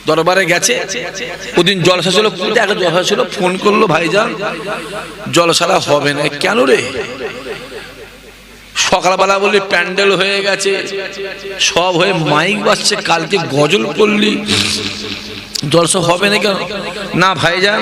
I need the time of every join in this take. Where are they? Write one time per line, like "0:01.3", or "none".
0:01.3